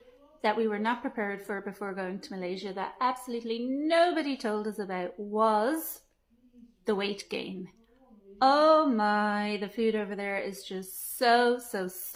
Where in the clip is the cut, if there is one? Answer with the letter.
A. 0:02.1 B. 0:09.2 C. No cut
C